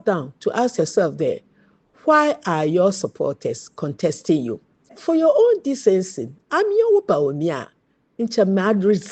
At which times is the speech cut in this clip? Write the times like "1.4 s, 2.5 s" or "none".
5.0 s